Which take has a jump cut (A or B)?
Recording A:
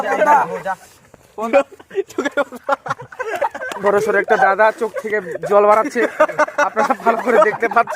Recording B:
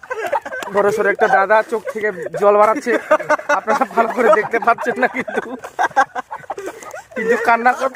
A